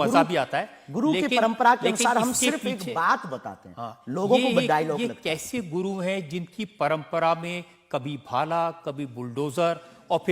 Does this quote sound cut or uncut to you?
uncut